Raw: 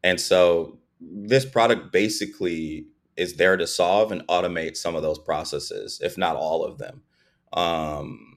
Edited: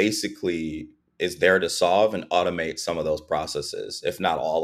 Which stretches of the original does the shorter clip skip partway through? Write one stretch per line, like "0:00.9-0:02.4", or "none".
none